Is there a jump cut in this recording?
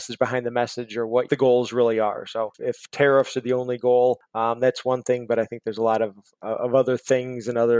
yes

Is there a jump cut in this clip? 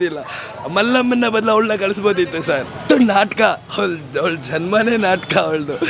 yes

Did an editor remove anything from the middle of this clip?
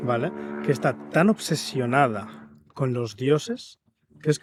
no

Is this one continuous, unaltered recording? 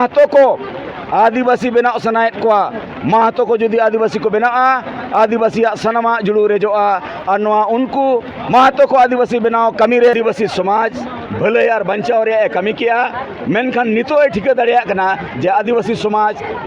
no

